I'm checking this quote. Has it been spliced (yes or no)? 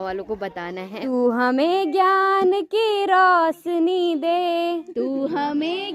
yes